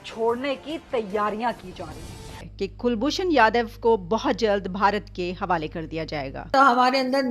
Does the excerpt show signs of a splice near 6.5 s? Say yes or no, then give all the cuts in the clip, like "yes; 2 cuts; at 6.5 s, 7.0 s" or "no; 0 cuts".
yes; 2 cuts; at 2.2 s, 6.5 s